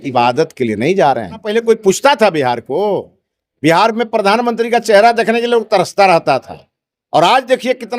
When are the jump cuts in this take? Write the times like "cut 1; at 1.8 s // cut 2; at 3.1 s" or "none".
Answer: cut 1; at 1.5 s